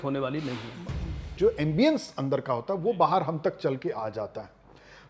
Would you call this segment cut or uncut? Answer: cut